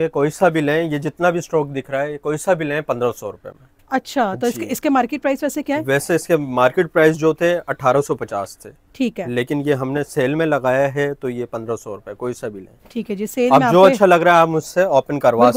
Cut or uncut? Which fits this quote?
uncut